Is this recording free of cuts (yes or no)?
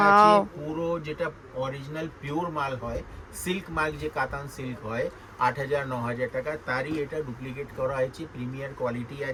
yes